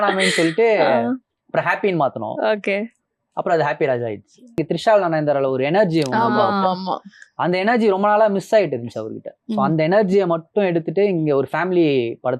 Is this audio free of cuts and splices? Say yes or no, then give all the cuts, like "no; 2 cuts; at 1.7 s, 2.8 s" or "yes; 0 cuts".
no; 1 cut; at 4.6 s